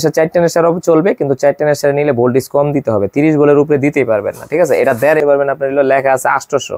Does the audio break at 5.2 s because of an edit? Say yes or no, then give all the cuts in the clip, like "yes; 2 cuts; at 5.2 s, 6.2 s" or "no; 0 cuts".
yes; 1 cut; at 5.2 s